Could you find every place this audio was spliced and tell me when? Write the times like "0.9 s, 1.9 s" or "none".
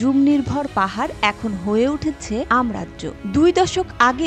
2.6 s

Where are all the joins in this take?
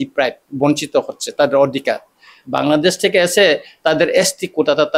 none

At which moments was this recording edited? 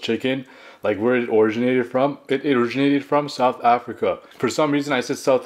4.3 s

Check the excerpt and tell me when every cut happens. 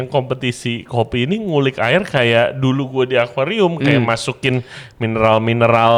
none

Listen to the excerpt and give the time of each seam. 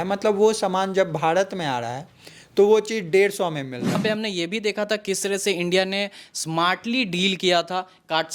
4.0 s

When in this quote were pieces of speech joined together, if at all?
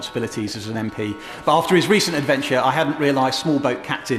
none

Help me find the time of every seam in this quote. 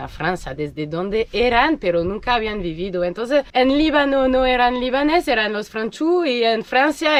none

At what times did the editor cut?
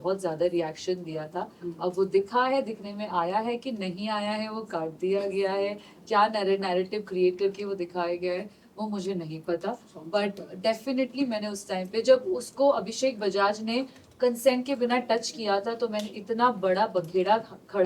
none

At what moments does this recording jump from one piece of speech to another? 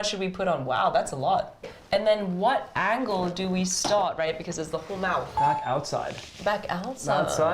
1.7 s, 5.3 s

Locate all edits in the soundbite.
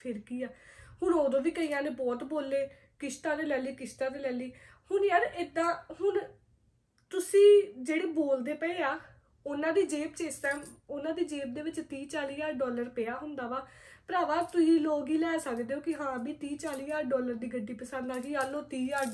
none

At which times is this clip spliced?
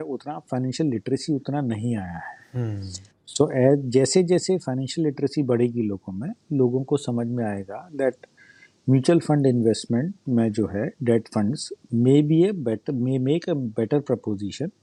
none

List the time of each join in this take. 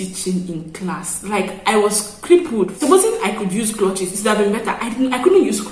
2.8 s

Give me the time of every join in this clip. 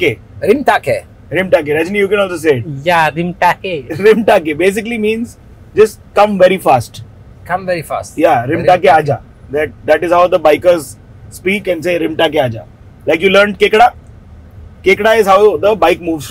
none

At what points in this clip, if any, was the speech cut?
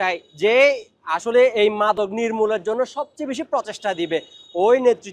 none

